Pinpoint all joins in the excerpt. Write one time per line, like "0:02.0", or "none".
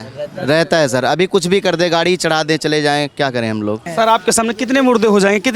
0:03.8